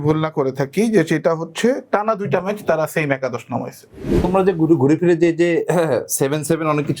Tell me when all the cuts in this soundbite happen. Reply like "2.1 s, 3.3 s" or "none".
4.2 s